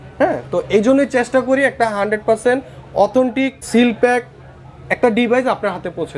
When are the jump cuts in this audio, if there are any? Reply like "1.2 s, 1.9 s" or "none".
3.6 s